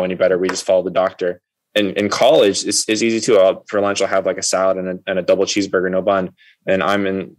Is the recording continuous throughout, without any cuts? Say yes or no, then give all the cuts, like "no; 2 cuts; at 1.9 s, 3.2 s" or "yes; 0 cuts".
no; 1 cut; at 1.4 s